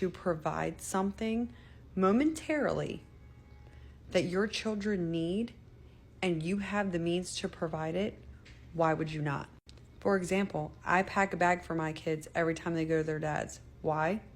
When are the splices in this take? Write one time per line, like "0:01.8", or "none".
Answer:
0:10.1

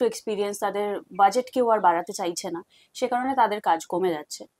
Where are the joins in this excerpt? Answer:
none

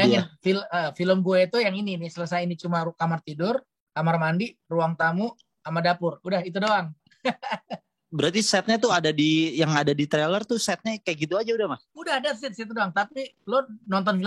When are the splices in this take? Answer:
none

